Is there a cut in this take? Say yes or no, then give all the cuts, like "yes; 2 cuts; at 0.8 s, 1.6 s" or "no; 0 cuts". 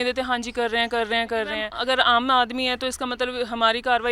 yes; 1 cut; at 1.7 s